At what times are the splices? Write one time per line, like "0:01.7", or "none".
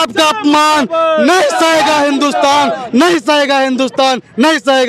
none